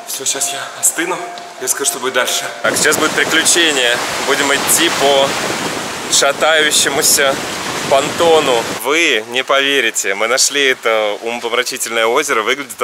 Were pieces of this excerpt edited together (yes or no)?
yes